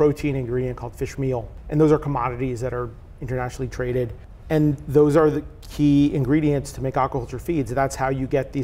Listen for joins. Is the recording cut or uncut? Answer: cut